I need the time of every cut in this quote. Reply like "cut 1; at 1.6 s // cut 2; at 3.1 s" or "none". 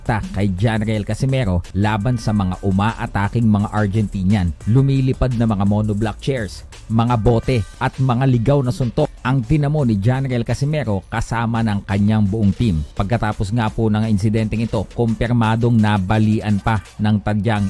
cut 1; at 1.7 s // cut 2; at 4.6 s // cut 3; at 7.7 s // cut 4; at 9.2 s // cut 5; at 12.9 s // cut 6; at 13.9 s